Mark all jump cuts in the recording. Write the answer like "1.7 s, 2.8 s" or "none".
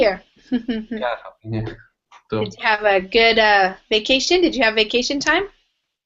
1.7 s